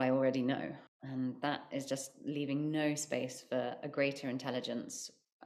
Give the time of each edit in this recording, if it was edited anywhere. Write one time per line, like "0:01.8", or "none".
0:00.9

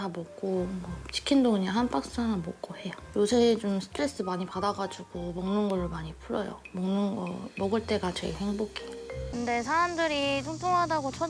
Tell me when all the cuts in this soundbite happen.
0:09.2

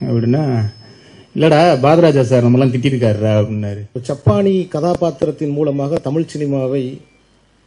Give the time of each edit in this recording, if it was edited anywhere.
0:04.0

